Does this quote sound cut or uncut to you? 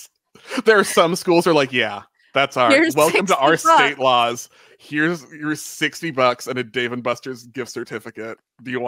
uncut